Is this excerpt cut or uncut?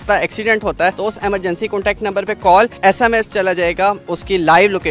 cut